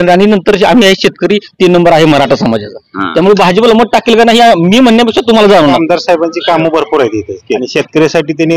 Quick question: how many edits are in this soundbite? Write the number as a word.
two